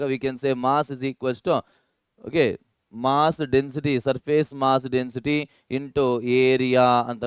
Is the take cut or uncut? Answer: uncut